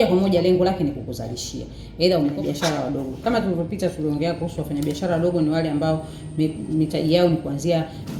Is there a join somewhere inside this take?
yes; 1 cut; at 2.4 s

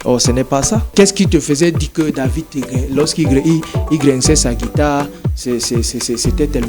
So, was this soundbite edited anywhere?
yes; 1 cut; at 0.9 s

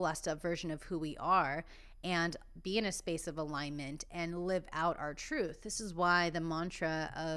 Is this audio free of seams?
yes; 0 cuts

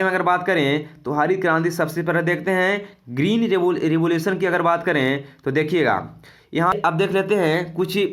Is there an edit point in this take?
yes; 1 cut; at 6.7 s

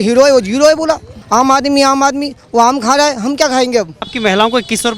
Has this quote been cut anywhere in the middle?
yes; 2 cuts; at 1.2 s, 4.0 s

